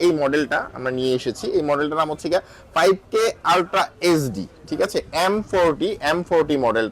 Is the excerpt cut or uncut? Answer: uncut